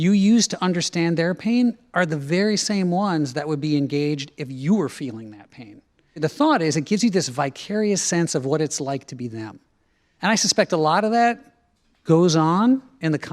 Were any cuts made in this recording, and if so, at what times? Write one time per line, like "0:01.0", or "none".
0:06.2
0:10.1